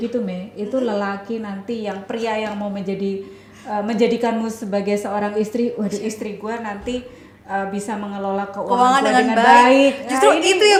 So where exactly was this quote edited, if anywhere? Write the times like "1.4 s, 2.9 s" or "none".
none